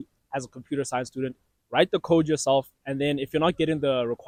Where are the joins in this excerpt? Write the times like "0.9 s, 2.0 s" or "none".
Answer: none

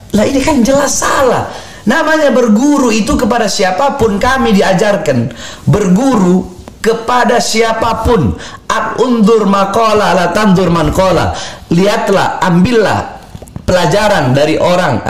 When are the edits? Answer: none

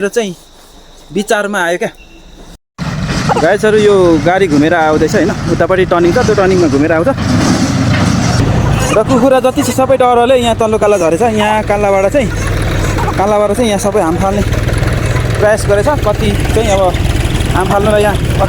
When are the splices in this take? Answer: 2.7 s

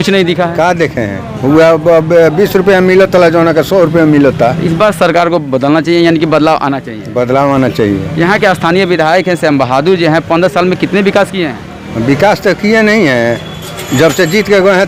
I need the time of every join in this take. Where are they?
none

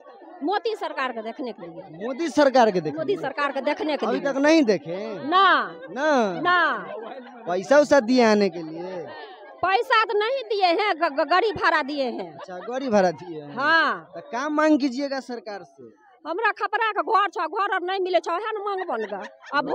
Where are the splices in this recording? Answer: none

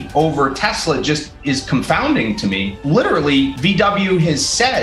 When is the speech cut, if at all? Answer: 2.7 s, 3.6 s

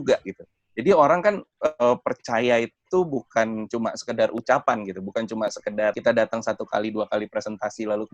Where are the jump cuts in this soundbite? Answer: 6.0 s

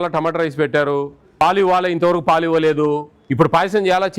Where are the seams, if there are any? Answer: 1.4 s, 3.1 s

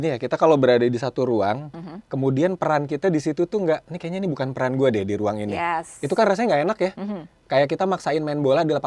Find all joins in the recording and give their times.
none

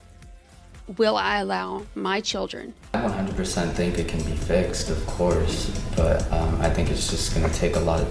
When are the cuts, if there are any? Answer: 2.9 s

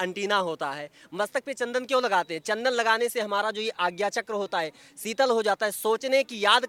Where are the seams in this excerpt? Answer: none

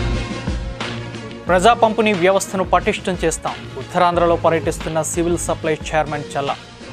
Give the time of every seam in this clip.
1.4 s

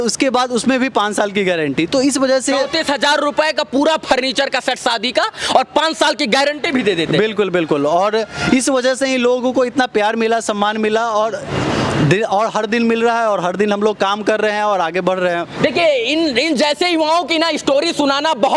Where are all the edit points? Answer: none

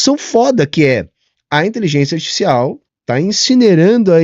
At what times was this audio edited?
2.9 s

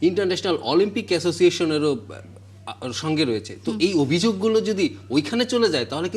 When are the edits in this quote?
none

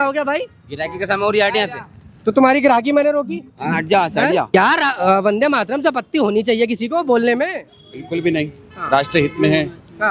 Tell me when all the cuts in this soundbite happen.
4.5 s

